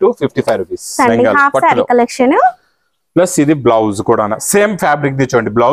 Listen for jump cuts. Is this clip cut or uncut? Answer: cut